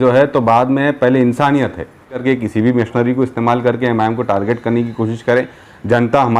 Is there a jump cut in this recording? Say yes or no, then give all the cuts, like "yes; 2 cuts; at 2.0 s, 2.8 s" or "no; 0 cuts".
yes; 1 cut; at 2.2 s